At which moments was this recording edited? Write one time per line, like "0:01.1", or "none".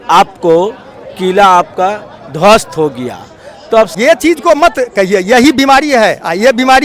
0:03.9